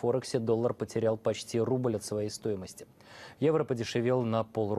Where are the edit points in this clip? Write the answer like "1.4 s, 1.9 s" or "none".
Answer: none